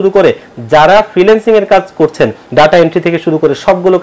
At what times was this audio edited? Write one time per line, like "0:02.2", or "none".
0:02.4